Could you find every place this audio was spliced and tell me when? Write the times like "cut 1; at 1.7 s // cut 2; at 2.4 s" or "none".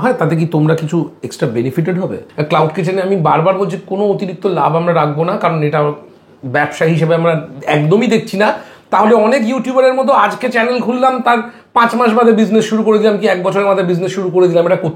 cut 1; at 2.2 s